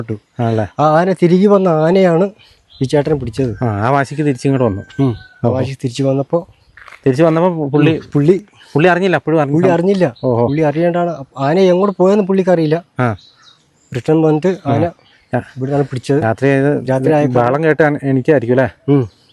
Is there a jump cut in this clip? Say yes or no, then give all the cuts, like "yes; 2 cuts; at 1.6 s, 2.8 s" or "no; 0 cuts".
no; 0 cuts